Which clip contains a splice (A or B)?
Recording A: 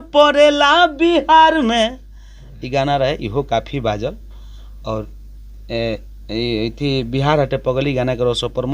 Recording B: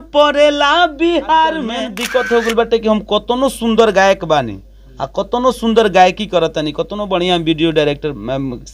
B